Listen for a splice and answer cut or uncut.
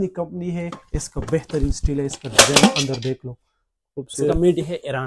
uncut